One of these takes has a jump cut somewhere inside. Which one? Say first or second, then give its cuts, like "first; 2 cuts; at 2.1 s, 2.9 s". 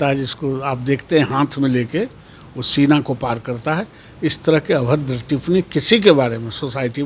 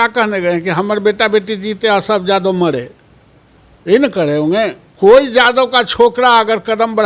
second; 1 cut; at 4.8 s